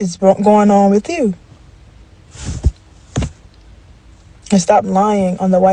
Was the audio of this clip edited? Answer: yes; 1 cut; at 2.3 s

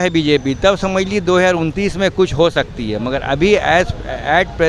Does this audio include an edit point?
no; 0 cuts

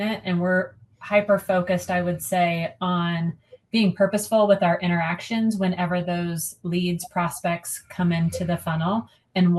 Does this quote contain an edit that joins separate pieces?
no; 0 cuts

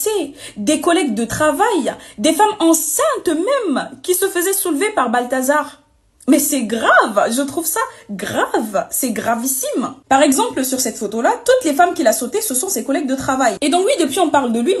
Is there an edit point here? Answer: no; 0 cuts

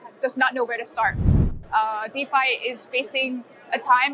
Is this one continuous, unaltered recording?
no; 1 cut; at 1.4 s

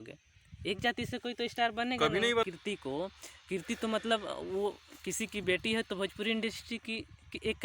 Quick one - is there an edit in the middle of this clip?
yes; 1 cut; at 2.4 s

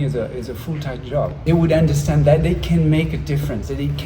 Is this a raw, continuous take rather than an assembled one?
no; 1 cut; at 1.4 s

